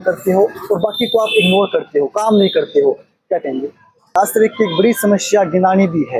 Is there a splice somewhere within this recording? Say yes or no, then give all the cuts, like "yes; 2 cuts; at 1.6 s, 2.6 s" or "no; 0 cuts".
yes; 1 cut; at 4.2 s